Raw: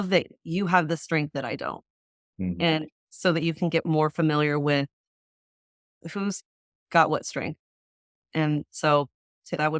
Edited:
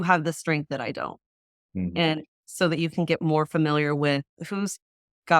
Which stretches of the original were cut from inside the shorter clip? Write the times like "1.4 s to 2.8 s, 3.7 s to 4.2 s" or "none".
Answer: 5.0 s to 6.0 s